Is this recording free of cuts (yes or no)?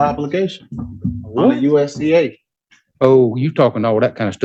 yes